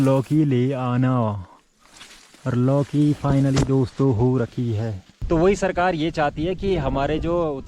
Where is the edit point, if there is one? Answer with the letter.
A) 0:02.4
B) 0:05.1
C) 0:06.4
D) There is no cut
B